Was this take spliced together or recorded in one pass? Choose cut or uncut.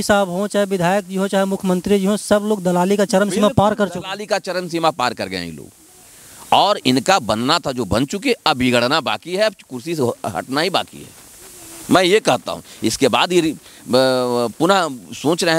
uncut